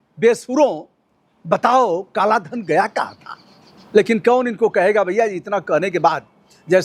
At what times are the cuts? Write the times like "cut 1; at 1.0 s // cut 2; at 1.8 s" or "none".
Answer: none